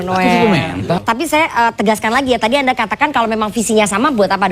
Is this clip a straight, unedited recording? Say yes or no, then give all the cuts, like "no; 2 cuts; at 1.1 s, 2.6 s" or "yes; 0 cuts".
no; 1 cut; at 1.0 s